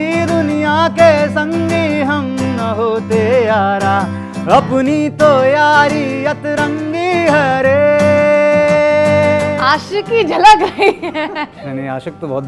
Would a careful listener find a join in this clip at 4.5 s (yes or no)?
no